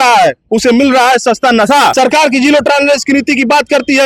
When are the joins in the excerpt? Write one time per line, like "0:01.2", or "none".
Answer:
0:01.9